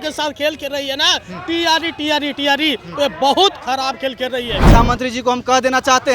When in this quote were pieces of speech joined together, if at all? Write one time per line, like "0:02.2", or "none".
0:04.7

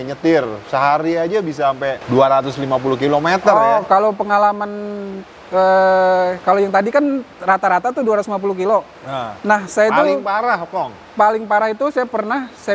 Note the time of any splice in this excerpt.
0:02.0

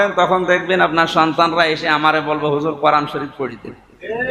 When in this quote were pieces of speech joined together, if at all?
none

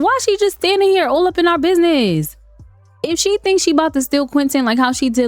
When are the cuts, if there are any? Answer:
none

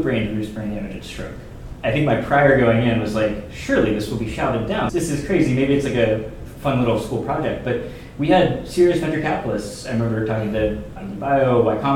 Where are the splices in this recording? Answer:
none

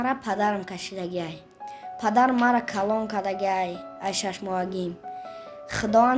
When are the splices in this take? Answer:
none

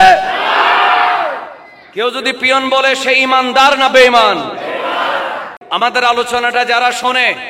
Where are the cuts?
0:05.5

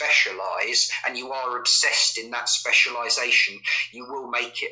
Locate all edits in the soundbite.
none

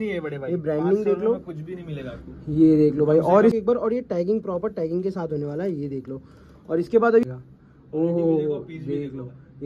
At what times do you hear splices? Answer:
0:03.6
0:07.2

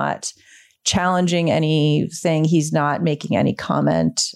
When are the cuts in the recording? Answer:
none

